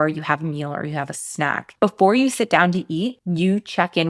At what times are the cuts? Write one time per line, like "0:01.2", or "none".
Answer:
0:01.6